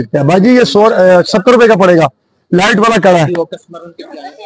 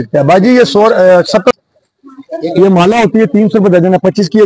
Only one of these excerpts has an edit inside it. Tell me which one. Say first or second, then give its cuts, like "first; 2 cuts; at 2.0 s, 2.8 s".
second; 1 cut; at 1.5 s